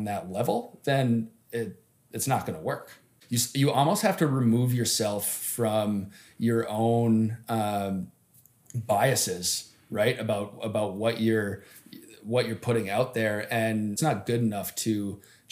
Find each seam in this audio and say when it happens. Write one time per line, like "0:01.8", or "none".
0:03.2
0:14.0